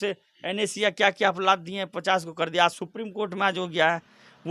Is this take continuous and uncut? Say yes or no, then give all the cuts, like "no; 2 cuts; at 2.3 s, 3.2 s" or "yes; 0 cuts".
yes; 0 cuts